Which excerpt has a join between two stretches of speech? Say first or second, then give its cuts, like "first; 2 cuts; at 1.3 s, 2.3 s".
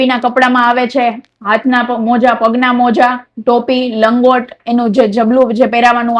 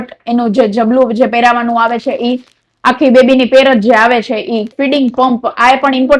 second; 1 cut; at 4.7 s